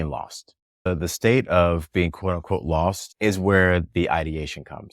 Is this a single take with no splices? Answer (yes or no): no